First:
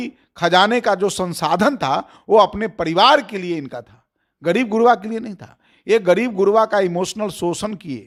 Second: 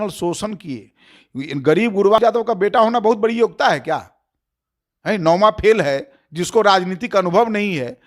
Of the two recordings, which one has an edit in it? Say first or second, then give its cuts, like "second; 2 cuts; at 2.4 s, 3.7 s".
second; 1 cut; at 2.2 s